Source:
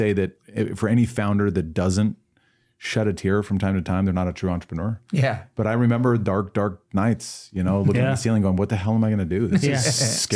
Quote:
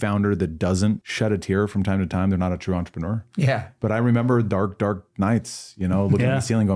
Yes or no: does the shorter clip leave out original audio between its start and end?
yes